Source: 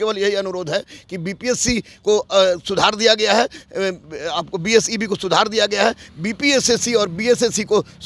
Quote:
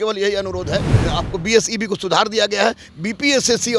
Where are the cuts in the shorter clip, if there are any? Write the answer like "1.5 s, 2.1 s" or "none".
1.0 s